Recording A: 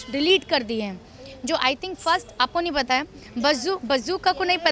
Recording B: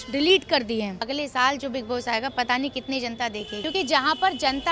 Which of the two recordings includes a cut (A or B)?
B